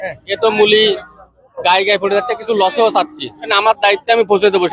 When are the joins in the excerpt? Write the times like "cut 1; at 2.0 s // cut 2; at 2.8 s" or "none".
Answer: cut 1; at 3.5 s